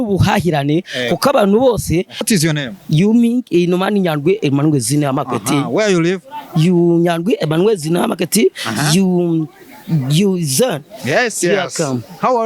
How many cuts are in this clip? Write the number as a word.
one